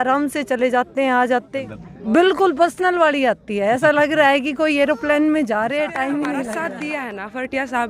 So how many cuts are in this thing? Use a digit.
2